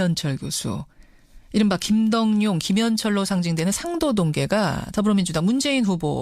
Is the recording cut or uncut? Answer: uncut